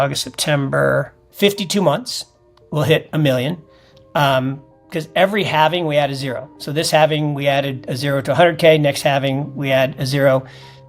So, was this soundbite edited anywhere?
yes; 1 cut; at 1.2 s

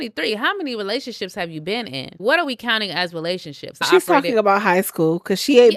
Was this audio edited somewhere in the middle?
yes; 2 cuts; at 2.2 s, 3.9 s

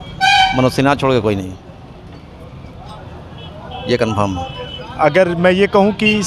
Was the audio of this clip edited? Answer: no; 0 cuts

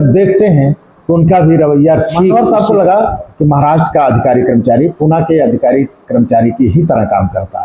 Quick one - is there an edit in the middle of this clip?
yes; 1 cut; at 2.3 s

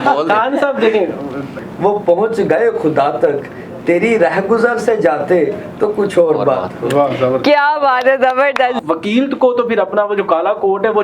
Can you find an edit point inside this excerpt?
yes; 2 cuts; at 1.5 s, 8.8 s

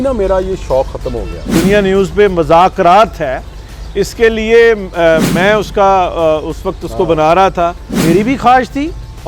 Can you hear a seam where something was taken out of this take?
yes; 2 cuts; at 1.5 s, 7.9 s

